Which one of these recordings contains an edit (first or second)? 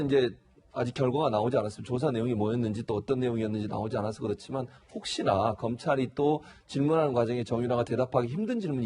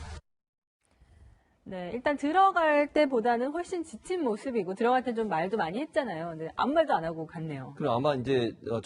first